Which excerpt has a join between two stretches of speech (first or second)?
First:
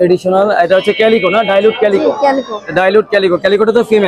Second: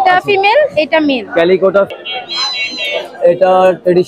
second